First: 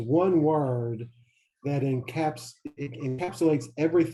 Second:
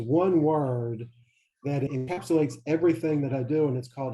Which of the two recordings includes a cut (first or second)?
second